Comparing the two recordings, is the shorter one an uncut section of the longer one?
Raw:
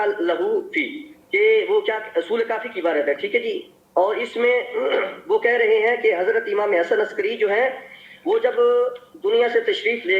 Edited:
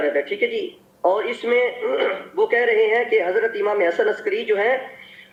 yes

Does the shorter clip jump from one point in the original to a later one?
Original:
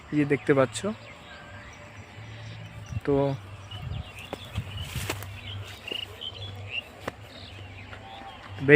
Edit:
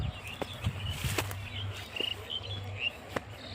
no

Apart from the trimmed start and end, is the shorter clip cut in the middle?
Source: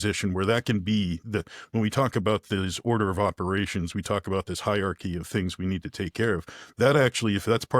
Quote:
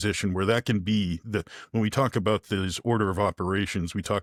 no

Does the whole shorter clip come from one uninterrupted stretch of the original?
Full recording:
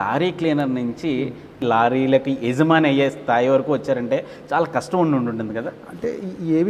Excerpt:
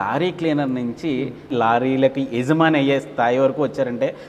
no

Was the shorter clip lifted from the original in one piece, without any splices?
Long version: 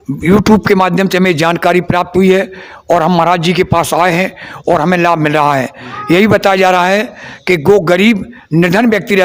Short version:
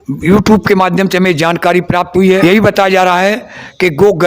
no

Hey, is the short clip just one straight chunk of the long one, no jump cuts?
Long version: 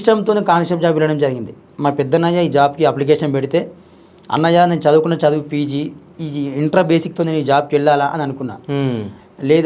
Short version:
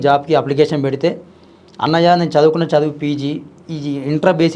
yes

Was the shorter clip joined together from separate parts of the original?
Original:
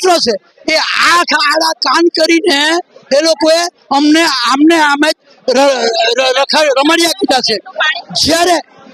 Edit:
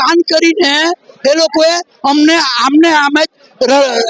no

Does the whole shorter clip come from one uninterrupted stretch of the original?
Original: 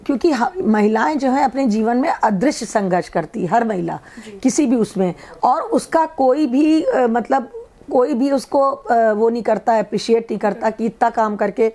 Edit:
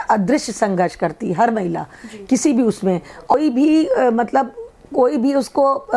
no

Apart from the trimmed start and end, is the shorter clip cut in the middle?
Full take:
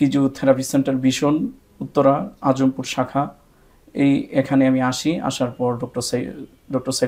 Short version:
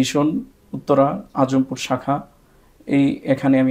no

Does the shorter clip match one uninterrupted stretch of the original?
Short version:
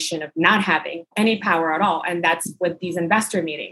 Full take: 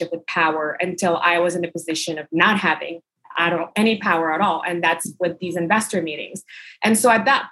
no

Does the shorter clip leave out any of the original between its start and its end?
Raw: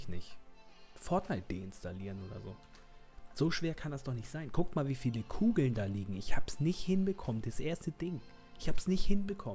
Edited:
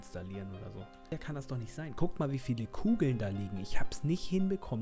yes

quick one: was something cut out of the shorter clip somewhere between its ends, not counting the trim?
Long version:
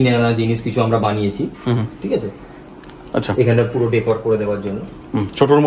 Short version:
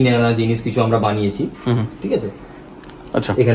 no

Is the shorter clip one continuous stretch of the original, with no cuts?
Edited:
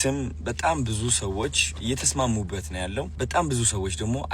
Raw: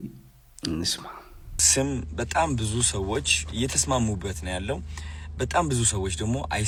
no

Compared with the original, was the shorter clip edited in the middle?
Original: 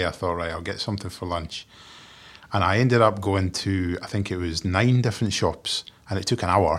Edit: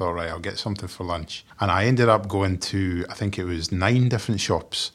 yes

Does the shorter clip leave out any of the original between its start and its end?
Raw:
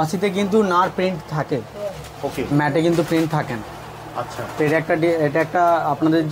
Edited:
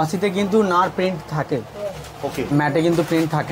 no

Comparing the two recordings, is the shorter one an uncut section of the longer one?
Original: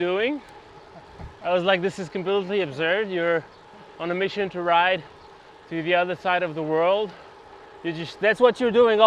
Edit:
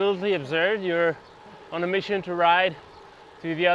yes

